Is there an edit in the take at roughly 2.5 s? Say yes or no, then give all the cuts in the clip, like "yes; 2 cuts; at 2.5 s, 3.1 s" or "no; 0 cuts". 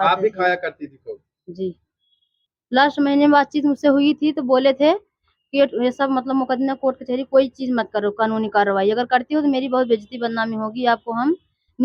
yes; 1 cut; at 2.5 s